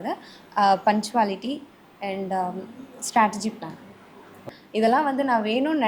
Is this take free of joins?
no; 1 cut; at 4.5 s

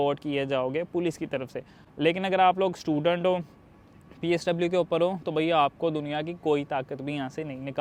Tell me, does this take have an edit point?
no; 0 cuts

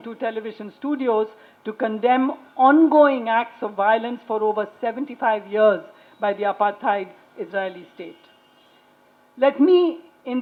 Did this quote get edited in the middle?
no; 0 cuts

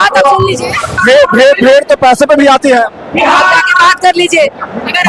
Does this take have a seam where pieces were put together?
yes; 1 cut; at 1.0 s

